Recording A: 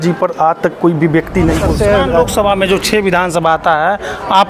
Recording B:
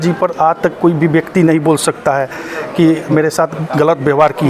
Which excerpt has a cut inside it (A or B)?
A